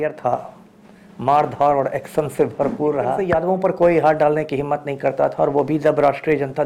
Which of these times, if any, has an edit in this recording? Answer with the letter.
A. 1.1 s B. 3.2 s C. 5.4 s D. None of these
B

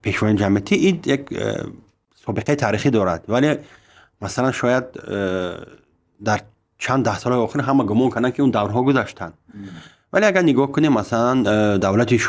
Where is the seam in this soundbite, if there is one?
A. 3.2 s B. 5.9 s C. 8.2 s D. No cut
D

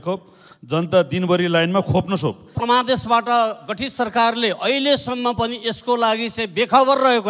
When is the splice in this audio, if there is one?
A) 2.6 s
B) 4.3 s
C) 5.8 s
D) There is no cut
A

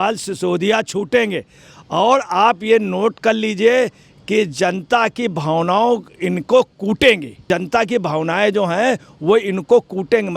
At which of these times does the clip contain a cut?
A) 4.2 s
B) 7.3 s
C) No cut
B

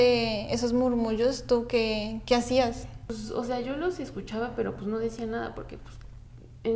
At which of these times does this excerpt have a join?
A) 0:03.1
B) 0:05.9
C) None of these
A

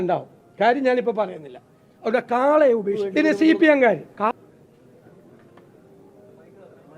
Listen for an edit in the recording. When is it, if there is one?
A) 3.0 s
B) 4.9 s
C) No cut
A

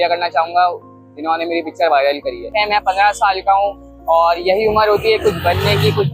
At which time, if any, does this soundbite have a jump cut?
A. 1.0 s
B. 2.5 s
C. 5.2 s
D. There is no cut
B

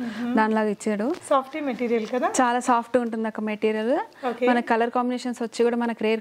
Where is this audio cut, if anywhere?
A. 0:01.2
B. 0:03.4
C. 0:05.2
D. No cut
A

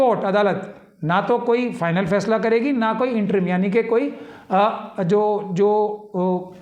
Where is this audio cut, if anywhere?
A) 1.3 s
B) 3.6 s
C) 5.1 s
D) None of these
D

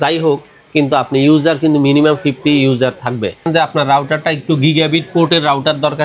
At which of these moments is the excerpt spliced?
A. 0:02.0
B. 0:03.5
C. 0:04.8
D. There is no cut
B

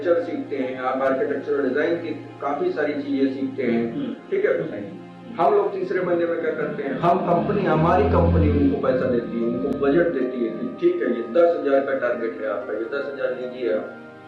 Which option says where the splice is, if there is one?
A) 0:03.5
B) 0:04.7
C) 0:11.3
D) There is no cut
B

